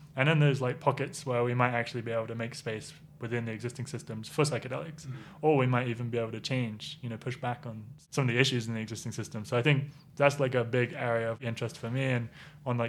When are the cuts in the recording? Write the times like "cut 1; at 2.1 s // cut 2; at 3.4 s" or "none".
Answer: cut 1; at 7.9 s // cut 2; at 11.4 s